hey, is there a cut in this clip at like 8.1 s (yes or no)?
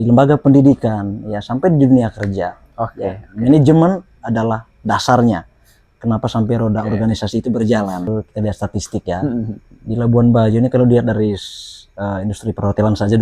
yes